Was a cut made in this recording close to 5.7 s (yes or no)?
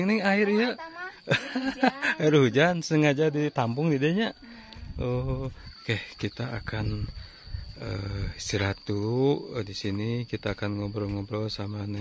yes